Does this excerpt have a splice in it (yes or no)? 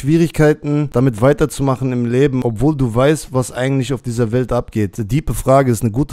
yes